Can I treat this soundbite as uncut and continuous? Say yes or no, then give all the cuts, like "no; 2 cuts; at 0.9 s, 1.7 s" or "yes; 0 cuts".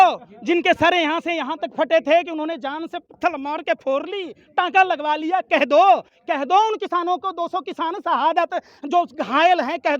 yes; 0 cuts